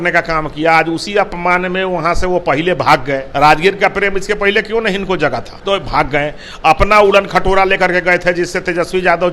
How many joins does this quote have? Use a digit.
2